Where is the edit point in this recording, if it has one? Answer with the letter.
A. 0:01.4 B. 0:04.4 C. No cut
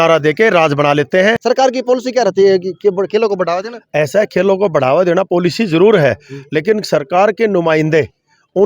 A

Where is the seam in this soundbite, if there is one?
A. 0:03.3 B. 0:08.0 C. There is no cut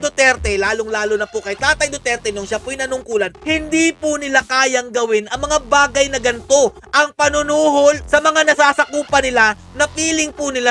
B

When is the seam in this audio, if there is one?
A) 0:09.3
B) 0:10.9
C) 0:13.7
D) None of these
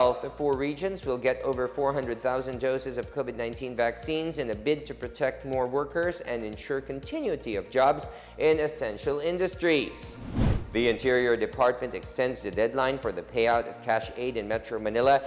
D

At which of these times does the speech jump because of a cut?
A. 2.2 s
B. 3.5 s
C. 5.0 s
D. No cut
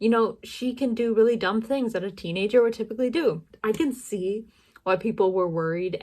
B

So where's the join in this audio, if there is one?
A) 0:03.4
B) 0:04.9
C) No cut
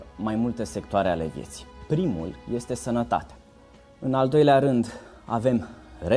A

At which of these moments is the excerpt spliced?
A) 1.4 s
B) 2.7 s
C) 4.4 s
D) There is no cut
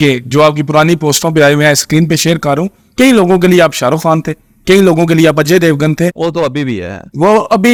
D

